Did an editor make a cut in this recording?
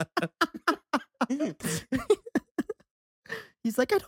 yes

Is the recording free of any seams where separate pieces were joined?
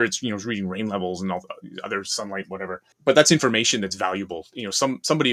no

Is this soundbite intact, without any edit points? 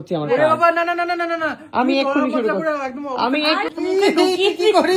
no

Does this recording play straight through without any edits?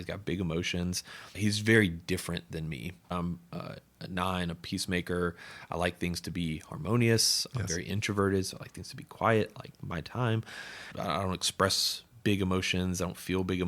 no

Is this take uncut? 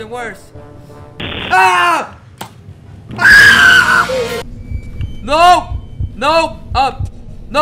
no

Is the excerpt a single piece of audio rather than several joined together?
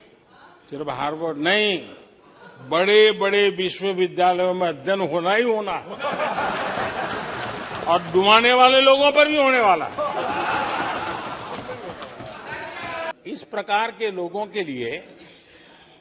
yes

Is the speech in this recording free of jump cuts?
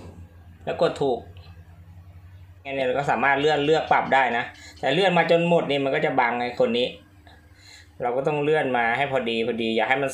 no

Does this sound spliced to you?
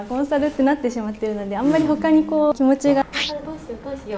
yes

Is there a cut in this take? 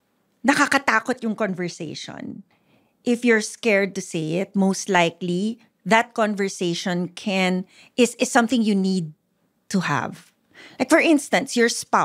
no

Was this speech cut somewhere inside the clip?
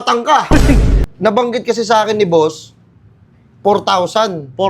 yes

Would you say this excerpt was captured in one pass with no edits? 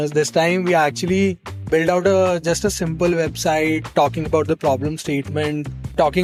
yes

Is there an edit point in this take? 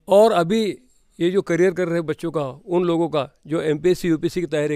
no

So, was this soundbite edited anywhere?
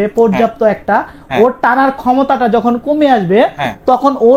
no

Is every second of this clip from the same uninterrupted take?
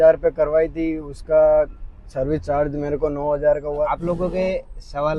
no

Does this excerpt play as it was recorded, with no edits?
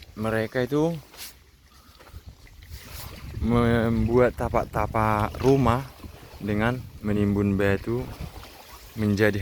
yes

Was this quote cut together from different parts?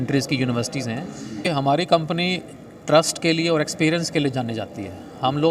yes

